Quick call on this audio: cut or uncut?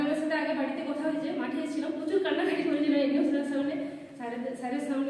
uncut